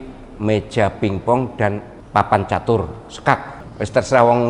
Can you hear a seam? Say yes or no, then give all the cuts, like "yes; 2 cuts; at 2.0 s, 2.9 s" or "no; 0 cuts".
yes; 2 cuts; at 1.9 s, 3.6 s